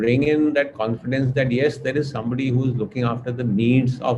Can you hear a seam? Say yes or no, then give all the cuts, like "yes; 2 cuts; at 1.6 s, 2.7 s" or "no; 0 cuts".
no; 0 cuts